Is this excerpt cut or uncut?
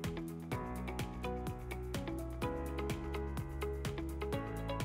uncut